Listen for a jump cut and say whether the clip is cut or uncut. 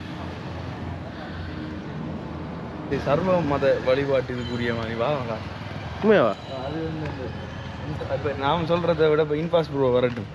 cut